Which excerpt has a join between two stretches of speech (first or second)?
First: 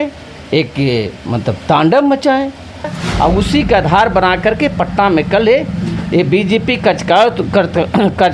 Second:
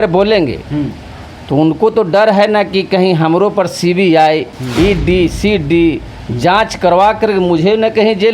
first